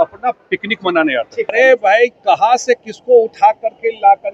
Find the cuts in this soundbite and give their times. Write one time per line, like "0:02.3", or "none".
0:01.5